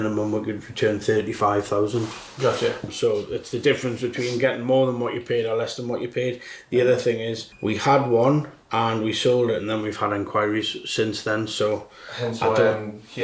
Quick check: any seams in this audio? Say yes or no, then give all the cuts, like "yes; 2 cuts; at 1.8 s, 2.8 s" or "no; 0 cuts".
no; 0 cuts